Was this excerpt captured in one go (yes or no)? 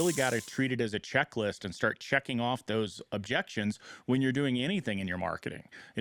yes